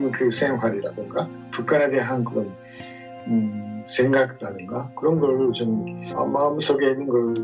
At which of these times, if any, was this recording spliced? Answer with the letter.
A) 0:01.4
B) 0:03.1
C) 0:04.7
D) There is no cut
D